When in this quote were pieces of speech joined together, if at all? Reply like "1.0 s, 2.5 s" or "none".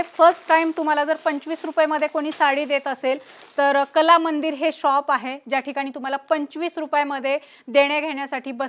none